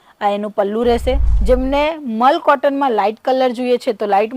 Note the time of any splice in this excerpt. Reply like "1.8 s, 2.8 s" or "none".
1.3 s